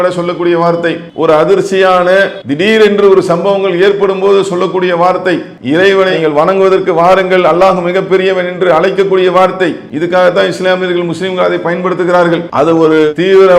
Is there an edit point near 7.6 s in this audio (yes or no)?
no